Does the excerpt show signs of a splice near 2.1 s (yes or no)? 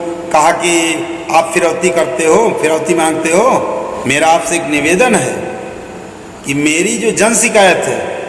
no